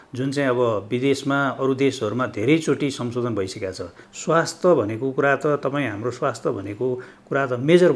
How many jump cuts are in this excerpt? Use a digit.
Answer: 1